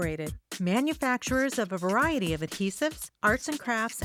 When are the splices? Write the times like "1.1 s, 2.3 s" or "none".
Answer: none